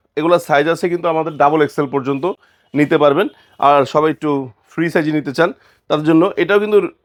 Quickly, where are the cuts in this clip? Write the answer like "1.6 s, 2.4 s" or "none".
none